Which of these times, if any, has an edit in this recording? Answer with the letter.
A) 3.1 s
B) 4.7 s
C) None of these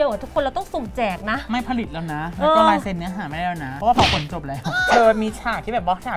B